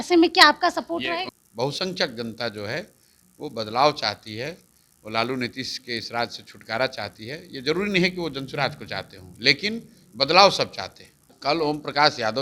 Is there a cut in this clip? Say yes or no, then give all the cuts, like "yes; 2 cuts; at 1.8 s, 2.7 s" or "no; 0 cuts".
yes; 2 cuts; at 1.4 s, 11.3 s